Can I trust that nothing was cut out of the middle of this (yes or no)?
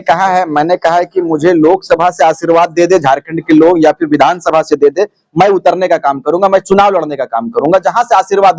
yes